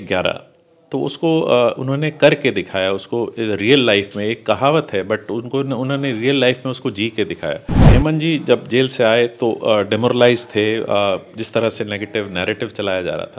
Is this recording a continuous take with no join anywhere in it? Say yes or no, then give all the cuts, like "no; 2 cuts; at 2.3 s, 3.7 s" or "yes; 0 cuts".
no; 1 cut; at 7.9 s